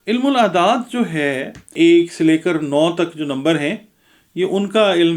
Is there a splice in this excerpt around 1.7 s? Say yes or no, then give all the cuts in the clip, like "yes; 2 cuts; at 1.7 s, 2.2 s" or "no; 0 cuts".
yes; 1 cut; at 1.7 s